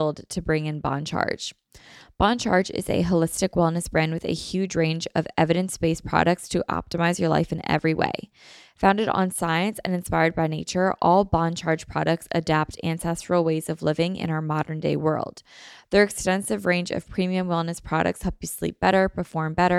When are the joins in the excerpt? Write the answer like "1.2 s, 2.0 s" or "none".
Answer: none